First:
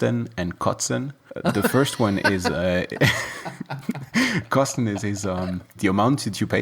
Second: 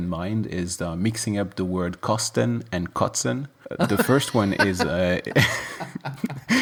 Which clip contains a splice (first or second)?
first